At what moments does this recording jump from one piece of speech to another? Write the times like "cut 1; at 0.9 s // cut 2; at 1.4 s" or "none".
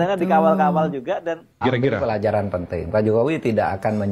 cut 1; at 1.4 s